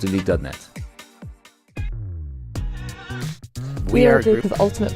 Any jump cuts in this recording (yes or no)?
yes